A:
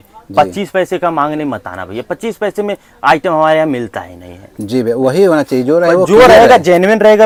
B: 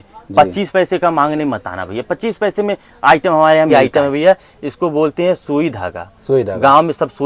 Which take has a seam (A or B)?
B